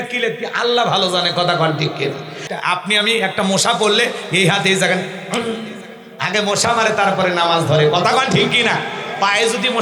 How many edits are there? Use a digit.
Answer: 1